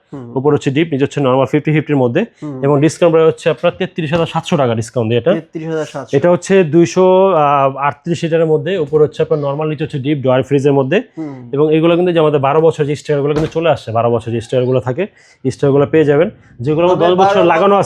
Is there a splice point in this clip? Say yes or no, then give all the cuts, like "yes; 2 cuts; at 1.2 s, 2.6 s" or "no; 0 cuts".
no; 0 cuts